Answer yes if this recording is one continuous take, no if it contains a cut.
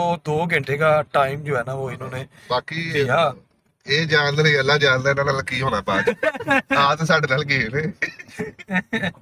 yes